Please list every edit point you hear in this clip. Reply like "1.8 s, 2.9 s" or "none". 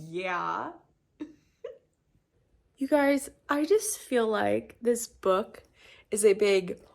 2.6 s